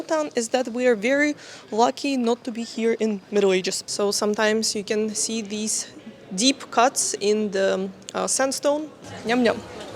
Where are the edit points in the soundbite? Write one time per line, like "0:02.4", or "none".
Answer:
0:03.8
0:09.0